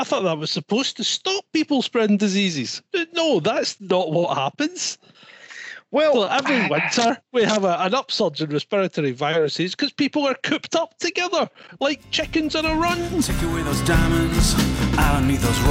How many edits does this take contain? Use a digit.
1